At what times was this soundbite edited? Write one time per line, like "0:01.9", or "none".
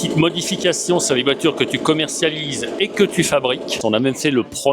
0:03.8